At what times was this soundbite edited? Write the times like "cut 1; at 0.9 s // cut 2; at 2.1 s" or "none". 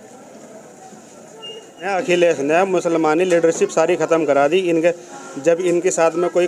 cut 1; at 1.9 s